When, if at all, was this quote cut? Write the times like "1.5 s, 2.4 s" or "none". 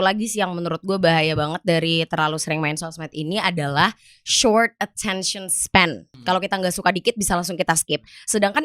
6.1 s